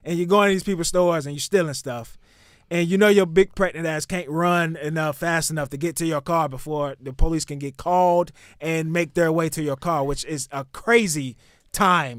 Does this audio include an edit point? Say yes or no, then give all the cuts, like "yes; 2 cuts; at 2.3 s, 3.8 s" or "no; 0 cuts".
no; 0 cuts